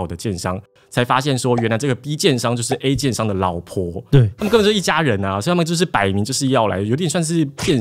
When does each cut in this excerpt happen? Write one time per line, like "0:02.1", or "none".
none